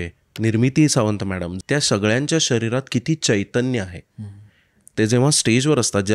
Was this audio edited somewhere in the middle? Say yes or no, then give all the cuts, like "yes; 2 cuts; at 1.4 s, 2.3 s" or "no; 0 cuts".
yes; 1 cut; at 1.5 s